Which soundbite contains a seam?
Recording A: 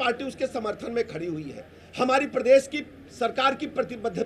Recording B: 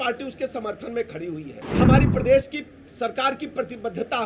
B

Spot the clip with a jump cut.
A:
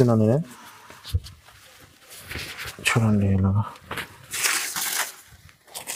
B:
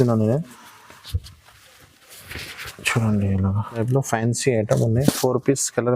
B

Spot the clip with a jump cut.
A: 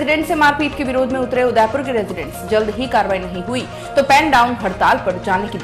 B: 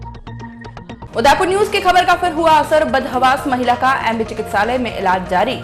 B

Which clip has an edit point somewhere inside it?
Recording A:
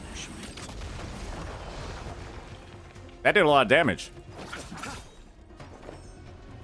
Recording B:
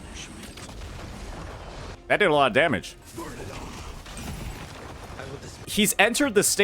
B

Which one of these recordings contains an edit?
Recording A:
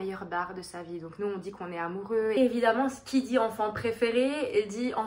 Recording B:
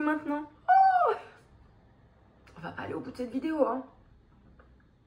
A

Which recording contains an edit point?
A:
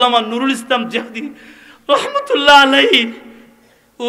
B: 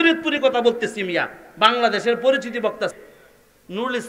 B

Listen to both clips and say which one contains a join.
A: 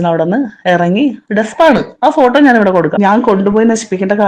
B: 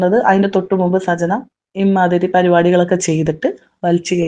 A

